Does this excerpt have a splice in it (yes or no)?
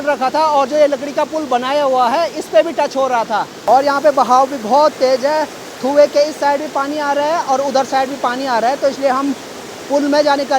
no